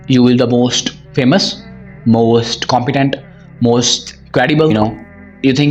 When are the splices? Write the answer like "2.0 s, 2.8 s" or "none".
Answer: 4.7 s